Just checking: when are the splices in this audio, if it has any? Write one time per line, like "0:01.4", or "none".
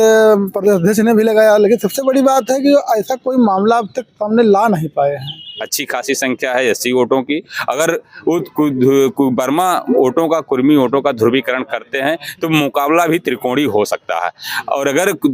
0:05.6